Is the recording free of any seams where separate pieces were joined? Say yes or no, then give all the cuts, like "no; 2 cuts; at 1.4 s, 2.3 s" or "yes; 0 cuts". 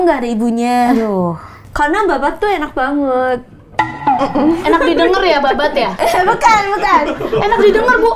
no; 1 cut; at 1.6 s